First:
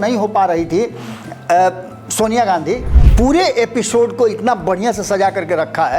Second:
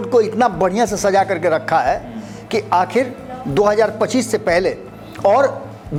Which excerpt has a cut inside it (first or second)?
first